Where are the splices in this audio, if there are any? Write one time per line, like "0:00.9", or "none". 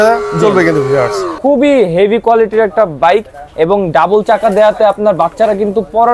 0:01.3